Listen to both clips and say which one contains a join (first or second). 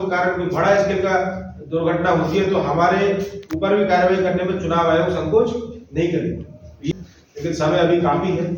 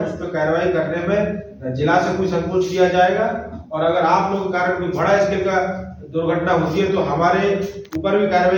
first